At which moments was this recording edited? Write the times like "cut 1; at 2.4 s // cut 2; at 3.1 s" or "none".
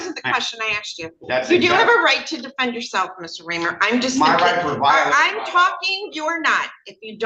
none